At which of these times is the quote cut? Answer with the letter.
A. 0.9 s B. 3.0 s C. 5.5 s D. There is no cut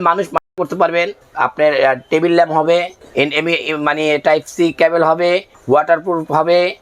C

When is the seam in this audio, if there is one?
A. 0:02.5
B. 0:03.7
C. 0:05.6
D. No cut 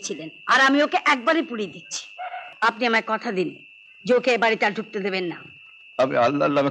A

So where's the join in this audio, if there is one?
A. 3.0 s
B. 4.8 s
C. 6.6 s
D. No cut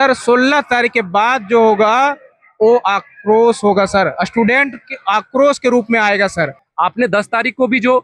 C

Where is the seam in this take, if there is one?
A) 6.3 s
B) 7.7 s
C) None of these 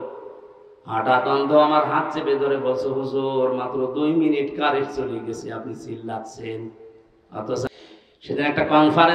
B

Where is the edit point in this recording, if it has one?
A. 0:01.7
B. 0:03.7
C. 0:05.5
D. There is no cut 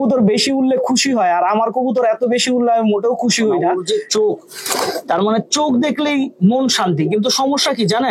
B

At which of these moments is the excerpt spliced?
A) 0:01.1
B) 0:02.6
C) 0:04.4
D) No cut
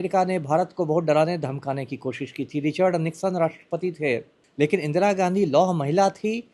C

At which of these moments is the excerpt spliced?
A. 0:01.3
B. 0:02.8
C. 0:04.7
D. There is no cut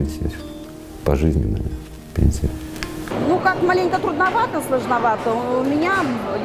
B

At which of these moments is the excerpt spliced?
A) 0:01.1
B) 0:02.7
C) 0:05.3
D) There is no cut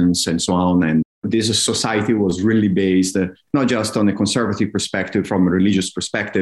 A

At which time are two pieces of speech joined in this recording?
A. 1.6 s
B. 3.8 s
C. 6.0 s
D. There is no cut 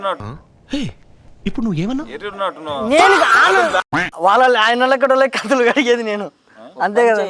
B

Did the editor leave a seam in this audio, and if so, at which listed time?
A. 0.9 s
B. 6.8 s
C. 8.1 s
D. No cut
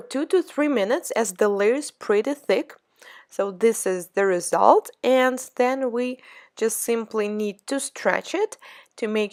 D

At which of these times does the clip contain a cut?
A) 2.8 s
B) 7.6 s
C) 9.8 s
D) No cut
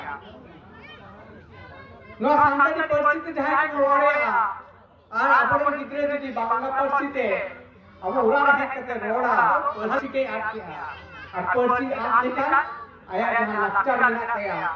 C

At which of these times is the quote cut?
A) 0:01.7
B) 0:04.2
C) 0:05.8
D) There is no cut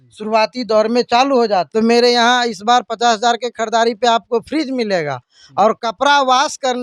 A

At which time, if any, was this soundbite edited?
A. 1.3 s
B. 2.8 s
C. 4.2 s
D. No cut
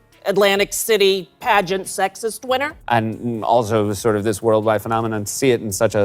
B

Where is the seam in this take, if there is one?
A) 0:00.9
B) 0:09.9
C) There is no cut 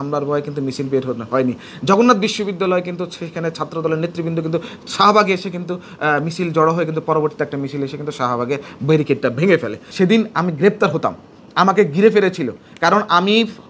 B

